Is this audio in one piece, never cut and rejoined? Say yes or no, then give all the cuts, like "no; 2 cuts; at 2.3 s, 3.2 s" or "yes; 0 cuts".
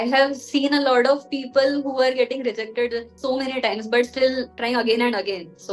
no; 2 cuts; at 3.1 s, 4.6 s